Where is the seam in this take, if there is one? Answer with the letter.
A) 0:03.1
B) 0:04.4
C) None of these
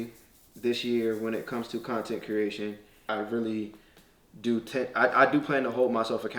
A